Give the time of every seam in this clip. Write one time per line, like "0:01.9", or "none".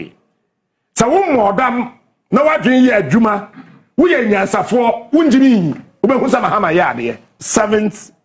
0:07.3